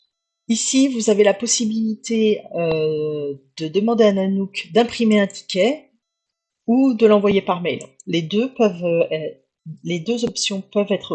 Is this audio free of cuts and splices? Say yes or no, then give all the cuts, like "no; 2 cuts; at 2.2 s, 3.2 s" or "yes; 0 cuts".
yes; 0 cuts